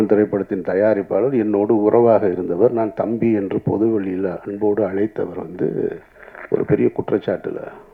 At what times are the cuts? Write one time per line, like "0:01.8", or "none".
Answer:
none